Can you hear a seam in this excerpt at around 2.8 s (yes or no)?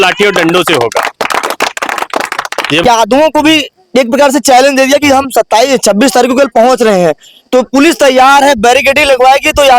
yes